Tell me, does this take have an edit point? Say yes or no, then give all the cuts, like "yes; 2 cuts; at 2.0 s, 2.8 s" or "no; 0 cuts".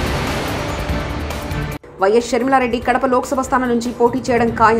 yes; 1 cut; at 1.8 s